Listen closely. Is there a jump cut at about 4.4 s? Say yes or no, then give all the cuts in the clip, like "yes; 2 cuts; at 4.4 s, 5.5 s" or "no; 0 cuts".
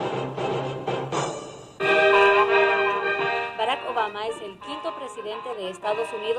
yes; 1 cut; at 4.4 s